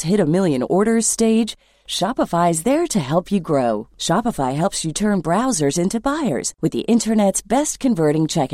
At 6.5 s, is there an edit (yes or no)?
no